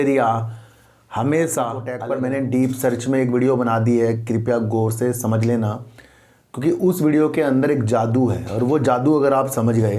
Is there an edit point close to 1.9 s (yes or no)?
yes